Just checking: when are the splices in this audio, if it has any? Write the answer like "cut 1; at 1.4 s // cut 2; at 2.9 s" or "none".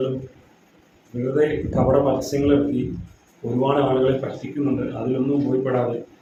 none